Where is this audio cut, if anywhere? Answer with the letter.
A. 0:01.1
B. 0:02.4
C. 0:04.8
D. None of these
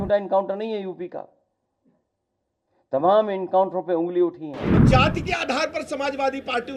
C